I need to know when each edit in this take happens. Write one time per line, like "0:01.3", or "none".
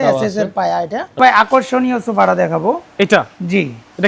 0:01.2

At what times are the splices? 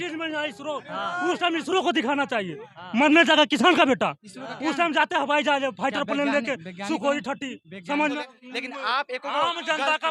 0:08.1

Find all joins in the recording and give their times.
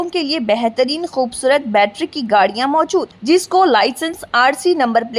none

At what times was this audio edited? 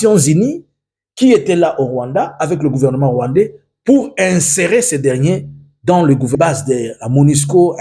0:06.4

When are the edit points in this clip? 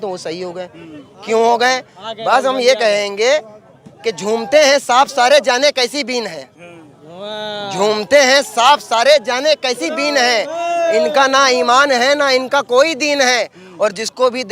none

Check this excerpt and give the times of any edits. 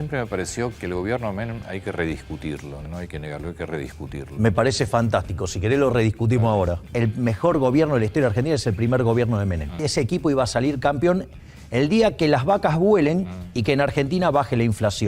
0:00.7
0:02.8
0:06.8
0:09.9

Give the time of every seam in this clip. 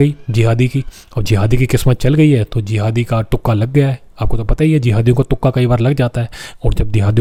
none

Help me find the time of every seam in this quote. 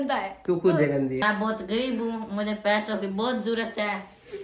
0:01.2

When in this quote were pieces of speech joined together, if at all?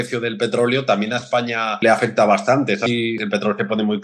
0:01.7
0:02.9

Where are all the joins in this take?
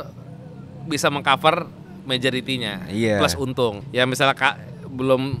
0:03.8

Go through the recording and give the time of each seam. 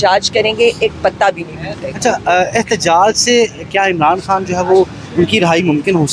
none

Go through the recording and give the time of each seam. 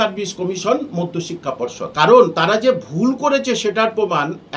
0:01.8

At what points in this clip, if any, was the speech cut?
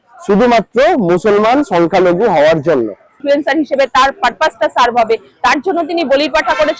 0:03.2

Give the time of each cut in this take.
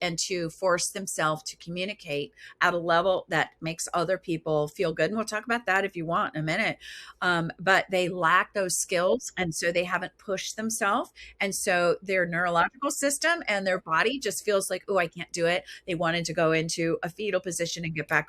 none

